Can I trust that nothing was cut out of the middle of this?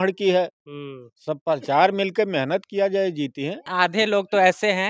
no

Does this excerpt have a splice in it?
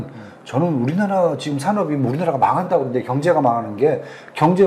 no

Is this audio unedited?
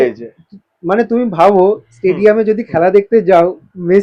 yes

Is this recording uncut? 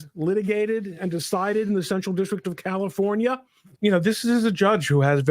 no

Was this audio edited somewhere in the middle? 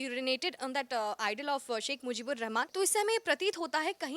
yes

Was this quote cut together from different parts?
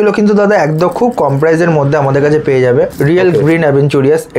yes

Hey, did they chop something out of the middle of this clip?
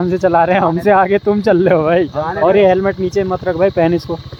no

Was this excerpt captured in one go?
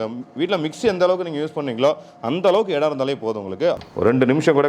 no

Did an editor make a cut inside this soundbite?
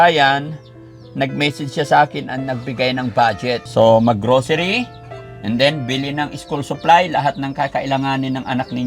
yes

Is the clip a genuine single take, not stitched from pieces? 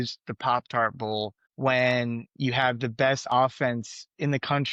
yes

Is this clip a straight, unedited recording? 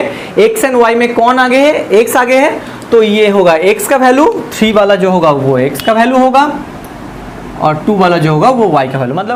yes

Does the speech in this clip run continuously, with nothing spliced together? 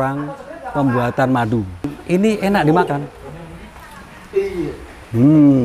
no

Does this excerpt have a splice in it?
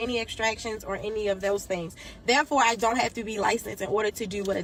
no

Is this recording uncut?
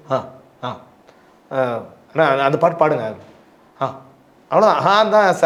yes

